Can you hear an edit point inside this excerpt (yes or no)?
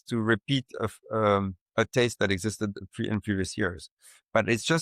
no